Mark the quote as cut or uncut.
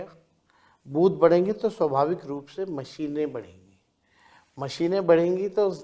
uncut